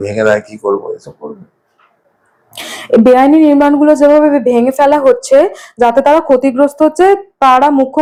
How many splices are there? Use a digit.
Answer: 0